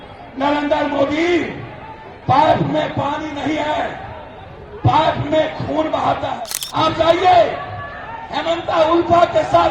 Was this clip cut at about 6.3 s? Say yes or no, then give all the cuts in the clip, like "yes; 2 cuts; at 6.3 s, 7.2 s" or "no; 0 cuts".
yes; 1 cut; at 6.3 s